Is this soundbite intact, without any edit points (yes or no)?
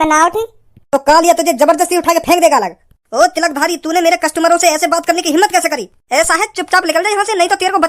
yes